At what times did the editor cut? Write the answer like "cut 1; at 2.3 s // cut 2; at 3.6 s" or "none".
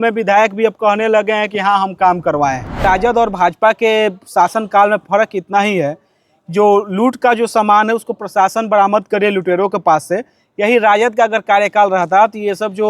cut 1; at 2.8 s